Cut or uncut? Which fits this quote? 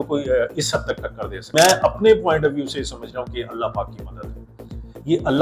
cut